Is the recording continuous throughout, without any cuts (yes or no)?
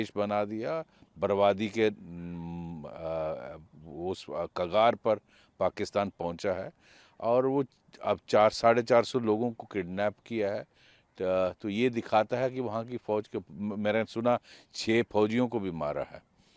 yes